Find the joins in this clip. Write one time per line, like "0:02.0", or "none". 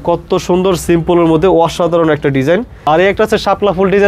0:02.7